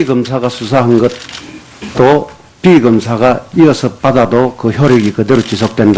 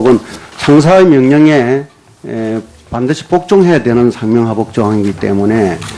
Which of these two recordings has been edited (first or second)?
second